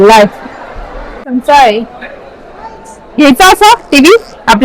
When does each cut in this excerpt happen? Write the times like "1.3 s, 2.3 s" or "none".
1.3 s